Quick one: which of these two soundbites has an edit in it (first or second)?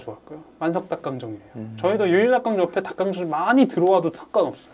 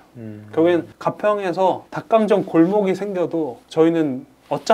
second